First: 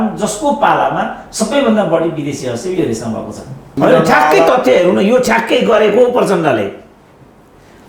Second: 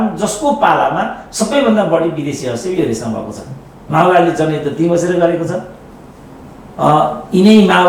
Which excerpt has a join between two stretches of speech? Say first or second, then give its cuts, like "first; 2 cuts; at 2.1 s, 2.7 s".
first; 1 cut; at 3.7 s